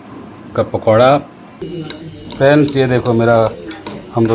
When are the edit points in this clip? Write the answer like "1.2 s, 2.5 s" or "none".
1.5 s